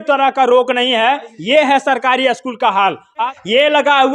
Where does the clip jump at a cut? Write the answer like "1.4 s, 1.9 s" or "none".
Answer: 3.2 s

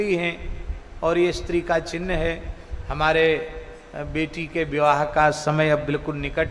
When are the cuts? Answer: none

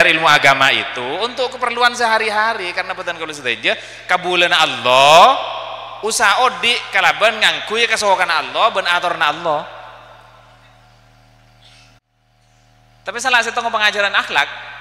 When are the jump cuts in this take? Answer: 12.1 s

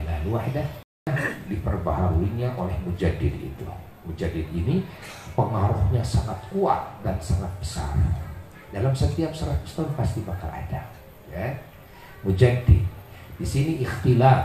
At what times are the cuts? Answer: 1.1 s

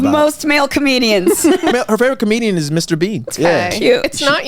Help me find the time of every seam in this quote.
1.7 s, 3.3 s

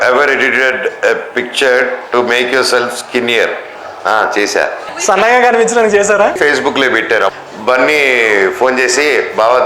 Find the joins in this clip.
4.8 s, 6.4 s, 7.3 s

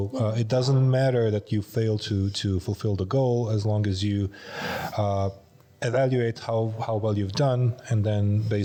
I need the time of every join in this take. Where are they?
none

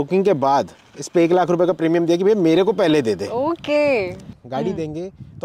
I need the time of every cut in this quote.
4.3 s

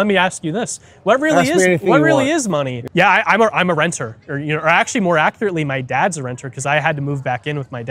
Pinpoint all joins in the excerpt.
2.8 s

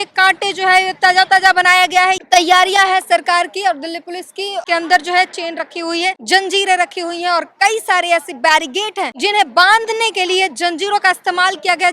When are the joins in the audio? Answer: 2.2 s, 4.6 s, 6.2 s, 9.1 s

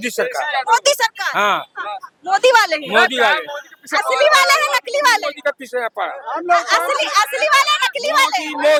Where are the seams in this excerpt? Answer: none

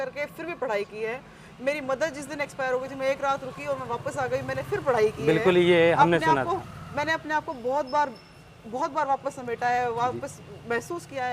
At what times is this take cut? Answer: none

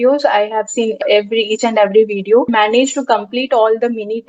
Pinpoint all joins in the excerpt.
1.0 s, 2.5 s

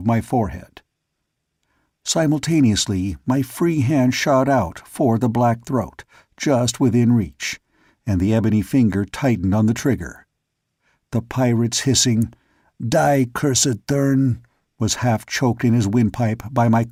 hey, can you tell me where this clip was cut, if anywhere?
none

